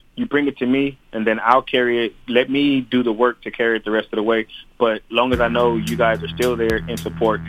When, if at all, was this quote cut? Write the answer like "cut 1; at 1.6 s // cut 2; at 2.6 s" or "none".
none